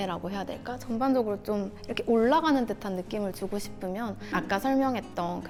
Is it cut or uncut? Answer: uncut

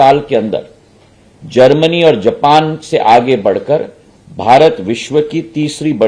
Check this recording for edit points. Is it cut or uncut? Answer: uncut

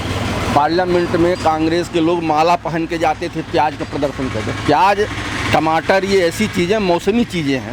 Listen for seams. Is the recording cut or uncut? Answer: uncut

